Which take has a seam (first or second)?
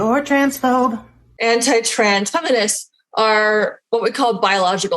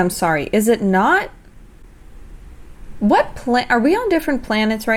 first